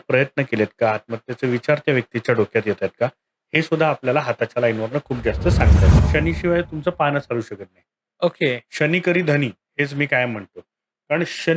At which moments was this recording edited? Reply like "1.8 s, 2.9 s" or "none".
5.9 s